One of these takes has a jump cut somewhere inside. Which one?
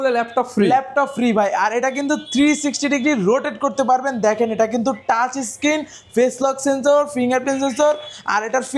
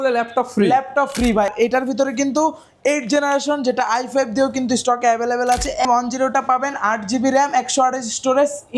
second; 2 cuts; at 1.5 s, 5.9 s

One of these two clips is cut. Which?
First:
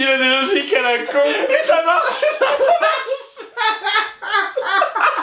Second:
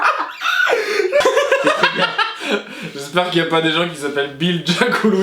second; 1 cut; at 1.2 s

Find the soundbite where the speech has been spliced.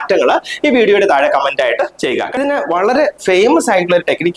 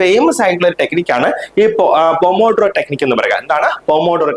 first; 1 cut; at 2.4 s

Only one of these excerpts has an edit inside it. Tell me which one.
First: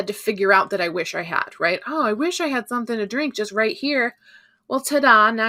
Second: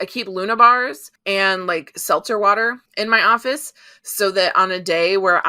second; 2 cuts; at 1.1 s, 2.8 s

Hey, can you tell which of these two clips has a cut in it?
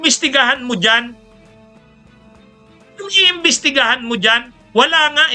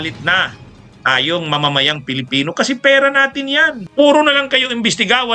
second; 1 cut; at 3.8 s

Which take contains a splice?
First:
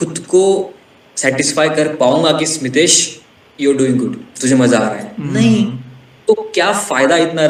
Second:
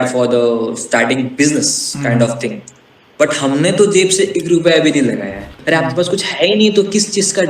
second; 1 cut; at 5.5 s

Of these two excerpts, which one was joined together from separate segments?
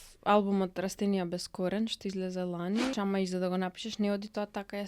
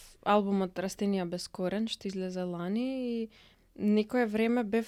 first; 1 cut; at 2.9 s

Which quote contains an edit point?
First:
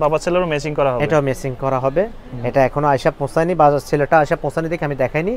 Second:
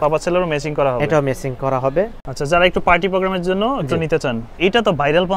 second; 2 cuts; at 2.2 s, 4.5 s

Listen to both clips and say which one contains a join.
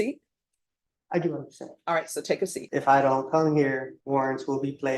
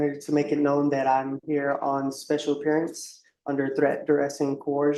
first; 2 cuts; at 2.6 s, 3.9 s

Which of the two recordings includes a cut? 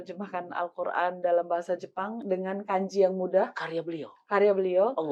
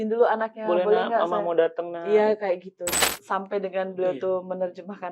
second; 1 cut; at 2.9 s

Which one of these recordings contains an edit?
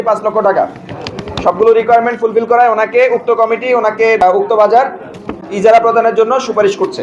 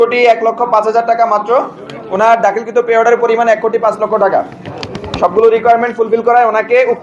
first; 1 cut; at 4.2 s

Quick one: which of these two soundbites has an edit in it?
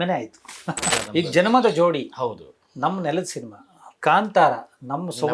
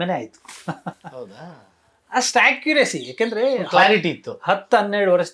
first; 1 cut; at 1.0 s

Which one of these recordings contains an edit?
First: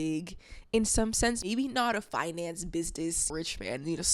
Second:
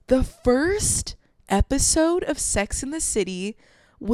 first; 2 cuts; at 1.5 s, 3.3 s

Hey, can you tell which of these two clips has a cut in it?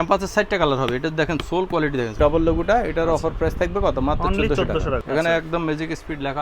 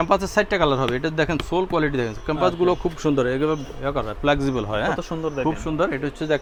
first; 2 cuts; at 2.1 s, 5.0 s

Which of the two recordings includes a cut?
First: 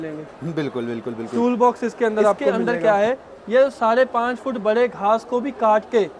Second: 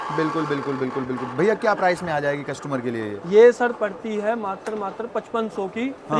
first; 1 cut; at 2.5 s

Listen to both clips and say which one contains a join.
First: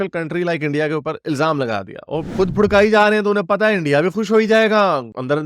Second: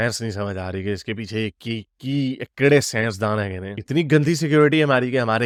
first; 1 cut; at 2.3 s

